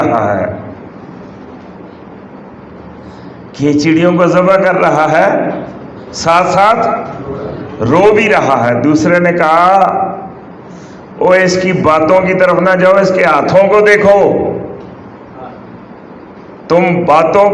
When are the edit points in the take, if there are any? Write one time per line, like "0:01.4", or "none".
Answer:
none